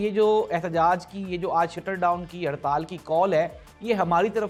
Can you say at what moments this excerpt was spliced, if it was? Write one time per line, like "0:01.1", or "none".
none